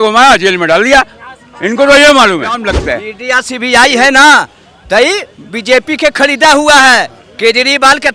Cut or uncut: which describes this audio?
cut